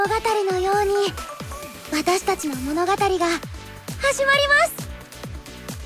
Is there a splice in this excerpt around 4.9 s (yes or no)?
yes